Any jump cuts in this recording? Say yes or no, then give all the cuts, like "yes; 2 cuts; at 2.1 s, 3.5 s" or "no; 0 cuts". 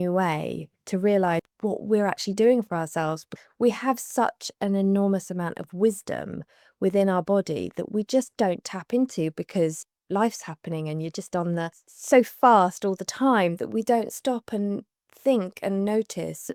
no; 0 cuts